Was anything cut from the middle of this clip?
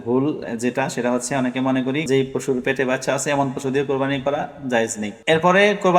yes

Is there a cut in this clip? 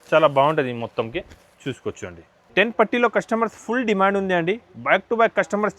yes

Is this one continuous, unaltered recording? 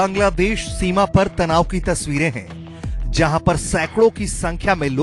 yes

